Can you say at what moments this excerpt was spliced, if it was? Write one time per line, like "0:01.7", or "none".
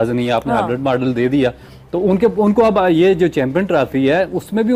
none